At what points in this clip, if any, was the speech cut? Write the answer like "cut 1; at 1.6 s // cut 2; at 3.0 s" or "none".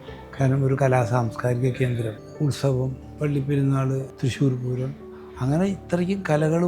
cut 1; at 2.2 s // cut 2; at 3.1 s // cut 3; at 4.1 s